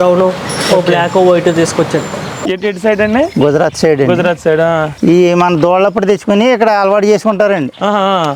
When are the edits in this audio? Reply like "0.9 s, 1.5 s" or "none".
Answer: 2.5 s